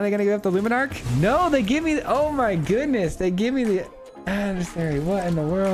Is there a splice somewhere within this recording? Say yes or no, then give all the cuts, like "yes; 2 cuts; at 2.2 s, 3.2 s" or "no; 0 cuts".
no; 0 cuts